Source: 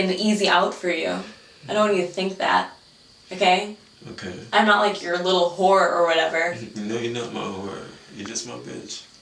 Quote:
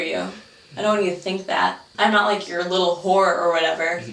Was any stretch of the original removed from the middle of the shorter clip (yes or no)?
yes